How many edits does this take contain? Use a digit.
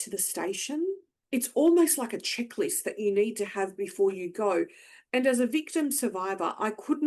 1